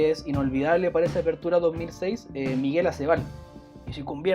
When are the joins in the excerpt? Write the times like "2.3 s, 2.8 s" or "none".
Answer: none